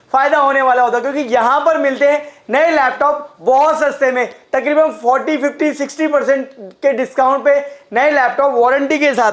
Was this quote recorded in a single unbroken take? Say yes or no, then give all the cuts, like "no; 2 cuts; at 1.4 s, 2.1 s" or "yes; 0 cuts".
yes; 0 cuts